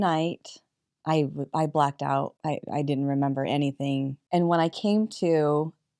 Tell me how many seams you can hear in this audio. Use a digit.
2